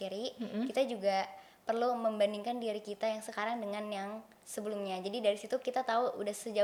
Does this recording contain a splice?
no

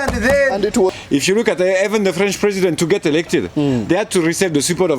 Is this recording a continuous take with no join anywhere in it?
no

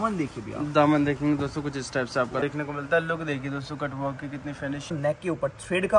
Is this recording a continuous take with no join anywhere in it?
no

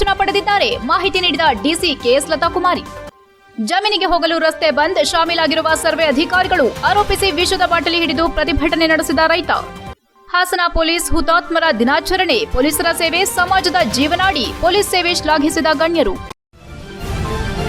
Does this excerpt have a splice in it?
yes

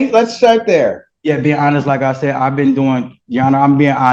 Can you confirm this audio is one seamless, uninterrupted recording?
yes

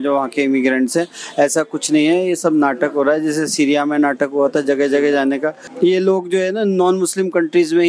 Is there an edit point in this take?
yes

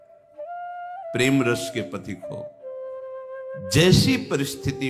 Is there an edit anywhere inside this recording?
yes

